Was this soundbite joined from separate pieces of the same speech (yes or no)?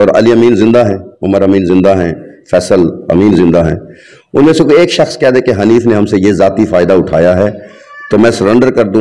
no